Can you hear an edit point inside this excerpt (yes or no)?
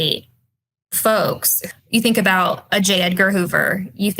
yes